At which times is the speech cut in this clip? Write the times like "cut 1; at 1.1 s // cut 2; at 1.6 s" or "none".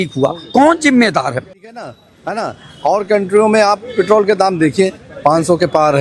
cut 1; at 1.6 s